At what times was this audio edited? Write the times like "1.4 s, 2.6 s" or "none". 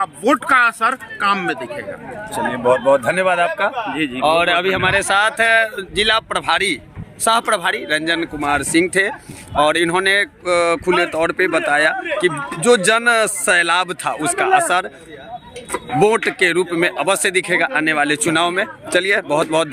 none